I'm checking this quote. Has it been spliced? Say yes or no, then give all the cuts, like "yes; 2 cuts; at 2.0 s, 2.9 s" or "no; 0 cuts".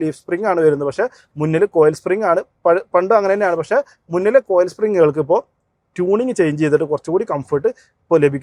no; 0 cuts